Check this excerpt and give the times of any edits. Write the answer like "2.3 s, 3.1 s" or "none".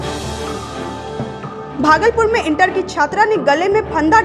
1.6 s